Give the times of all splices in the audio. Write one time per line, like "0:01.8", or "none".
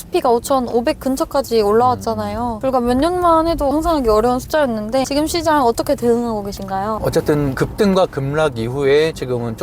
0:03.7
0:05.1
0:07.0